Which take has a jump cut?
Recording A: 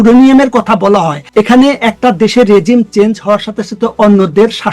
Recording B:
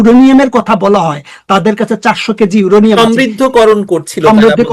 A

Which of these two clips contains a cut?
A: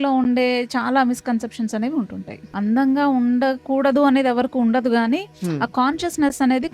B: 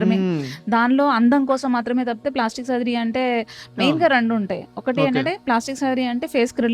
A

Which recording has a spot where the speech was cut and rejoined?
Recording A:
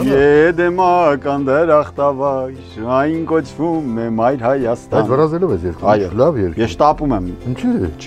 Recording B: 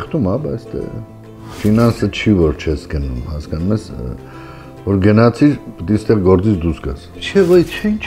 B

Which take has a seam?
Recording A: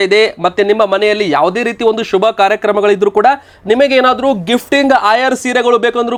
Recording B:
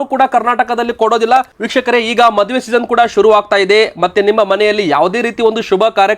B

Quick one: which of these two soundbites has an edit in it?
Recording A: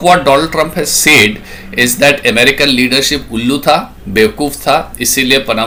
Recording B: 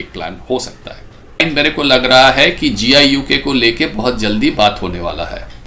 B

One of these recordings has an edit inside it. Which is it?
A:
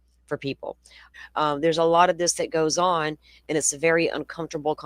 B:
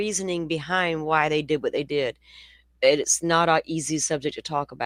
A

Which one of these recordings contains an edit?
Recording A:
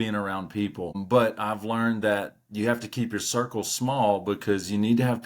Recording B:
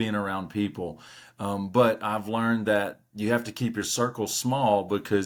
A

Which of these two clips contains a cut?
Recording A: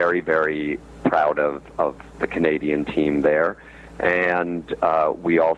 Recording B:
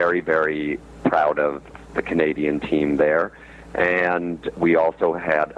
B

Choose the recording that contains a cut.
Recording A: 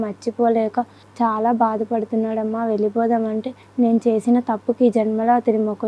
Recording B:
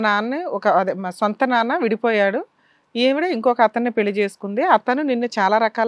A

